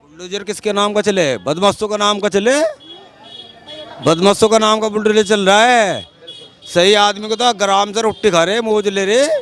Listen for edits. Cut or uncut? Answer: uncut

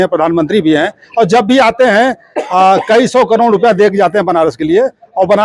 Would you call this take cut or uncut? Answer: uncut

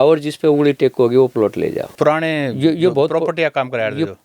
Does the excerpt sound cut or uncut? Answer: cut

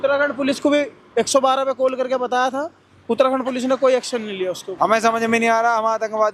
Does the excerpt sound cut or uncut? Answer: cut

